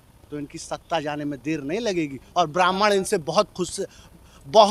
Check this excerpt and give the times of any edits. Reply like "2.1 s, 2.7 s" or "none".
none